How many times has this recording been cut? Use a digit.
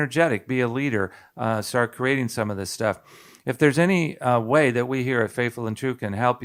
0